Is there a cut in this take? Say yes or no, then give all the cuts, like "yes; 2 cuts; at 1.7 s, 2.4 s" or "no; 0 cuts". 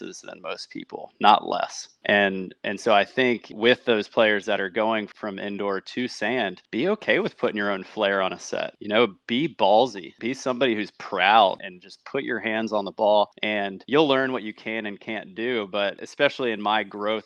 no; 0 cuts